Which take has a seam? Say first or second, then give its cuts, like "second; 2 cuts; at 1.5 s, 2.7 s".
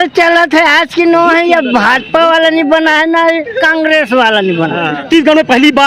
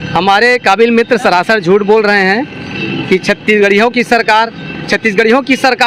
first; 1 cut; at 5.0 s